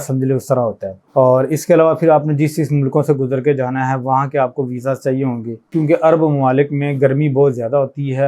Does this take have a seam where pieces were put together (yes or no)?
yes